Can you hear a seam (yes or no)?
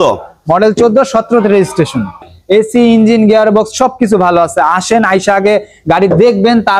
yes